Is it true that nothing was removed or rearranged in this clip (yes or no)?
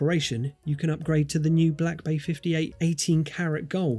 no